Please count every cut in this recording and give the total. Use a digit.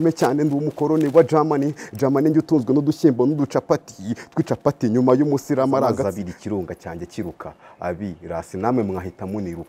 1